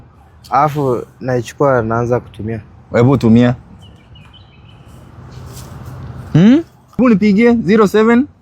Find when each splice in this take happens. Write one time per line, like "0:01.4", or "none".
0:07.0